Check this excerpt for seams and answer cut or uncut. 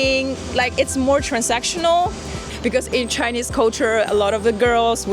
cut